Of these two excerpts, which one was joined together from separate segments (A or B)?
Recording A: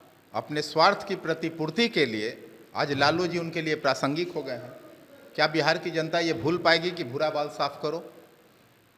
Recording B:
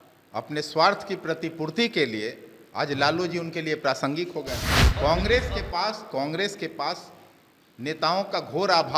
B